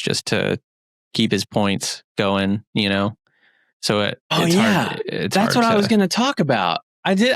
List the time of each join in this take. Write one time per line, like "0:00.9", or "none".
0:04.3